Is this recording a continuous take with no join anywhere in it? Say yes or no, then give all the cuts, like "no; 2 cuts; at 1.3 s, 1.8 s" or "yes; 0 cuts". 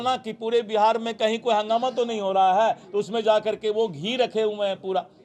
yes; 0 cuts